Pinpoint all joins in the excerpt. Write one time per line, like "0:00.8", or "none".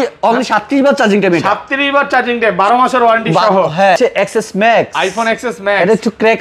0:04.0